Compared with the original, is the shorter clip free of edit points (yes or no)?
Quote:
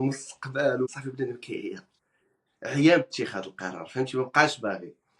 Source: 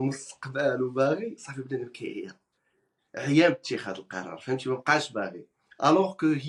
no